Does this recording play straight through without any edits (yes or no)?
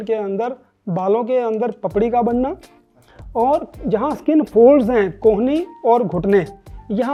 yes